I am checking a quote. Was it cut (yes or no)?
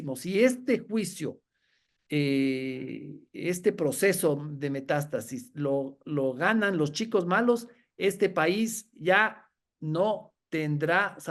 no